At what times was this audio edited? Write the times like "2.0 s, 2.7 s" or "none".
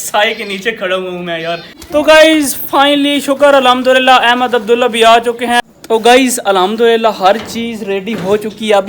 1.7 s, 5.6 s

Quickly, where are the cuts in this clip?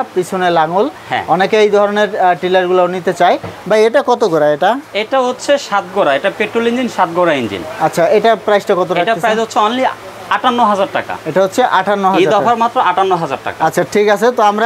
none

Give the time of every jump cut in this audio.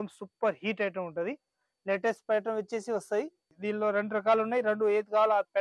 3.5 s

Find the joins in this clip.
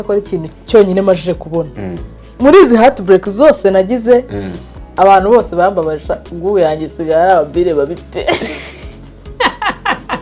2.2 s

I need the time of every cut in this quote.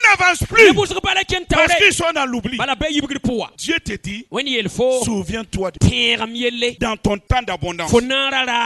3.5 s, 5.7 s, 6.8 s

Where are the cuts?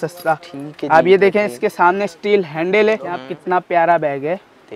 3.3 s

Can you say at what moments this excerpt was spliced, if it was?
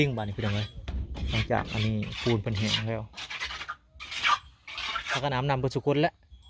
5.2 s

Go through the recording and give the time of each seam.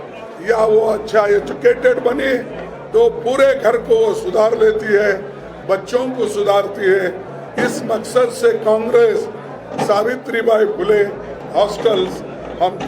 11.4 s

